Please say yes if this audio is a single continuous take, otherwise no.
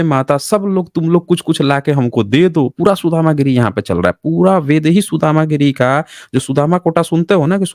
yes